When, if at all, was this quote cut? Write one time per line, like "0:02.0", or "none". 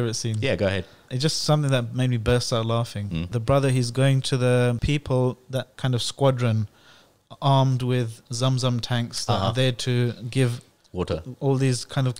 0:01.1
0:03.3
0:04.8
0:05.7